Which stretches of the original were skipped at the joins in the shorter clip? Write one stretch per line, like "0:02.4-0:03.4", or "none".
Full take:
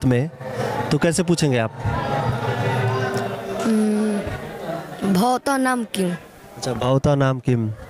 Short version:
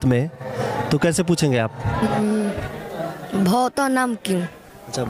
0:02.1-0:03.8